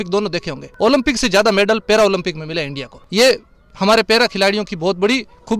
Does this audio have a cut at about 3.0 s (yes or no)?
no